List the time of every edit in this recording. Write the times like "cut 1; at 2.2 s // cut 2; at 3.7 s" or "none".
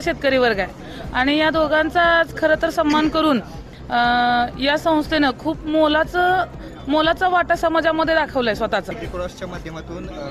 cut 1; at 9.0 s